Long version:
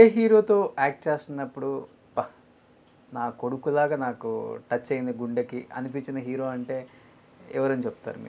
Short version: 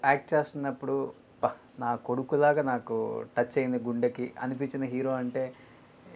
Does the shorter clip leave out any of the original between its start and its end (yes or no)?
yes